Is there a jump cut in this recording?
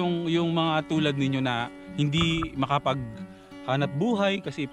no; 0 cuts

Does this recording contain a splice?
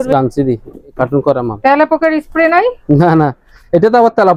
no; 0 cuts

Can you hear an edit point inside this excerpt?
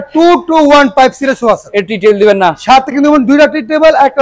no; 0 cuts

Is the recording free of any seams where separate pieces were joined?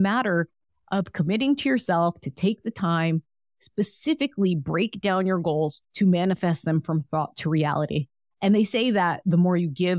no; 1 cut; at 5.8 s

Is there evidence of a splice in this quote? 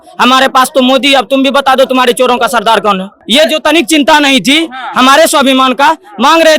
yes; 1 cut; at 3.1 s

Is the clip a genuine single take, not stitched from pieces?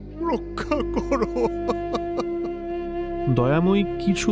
no; 1 cut; at 3.3 s

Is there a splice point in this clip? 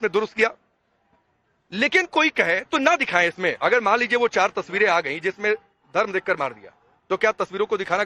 no; 0 cuts

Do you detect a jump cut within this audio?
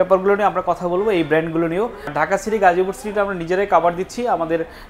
yes; 1 cut; at 2.1 s

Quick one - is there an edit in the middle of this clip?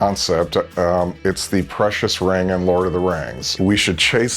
yes; 1 cut; at 3.4 s

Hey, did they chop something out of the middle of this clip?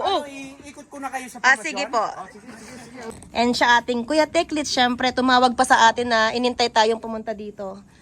yes; 1 cut; at 3.0 s

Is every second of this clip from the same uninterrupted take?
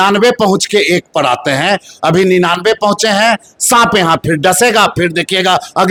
yes; 0 cuts

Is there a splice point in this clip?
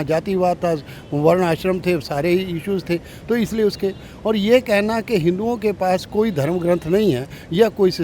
no; 0 cuts

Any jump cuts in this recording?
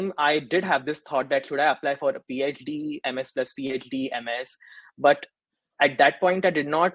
no; 0 cuts

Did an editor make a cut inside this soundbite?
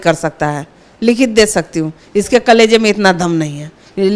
no; 0 cuts

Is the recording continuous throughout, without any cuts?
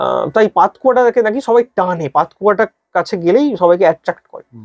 yes; 0 cuts

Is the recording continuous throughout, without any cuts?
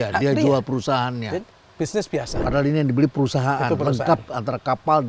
no; 1 cut; at 2.3 s

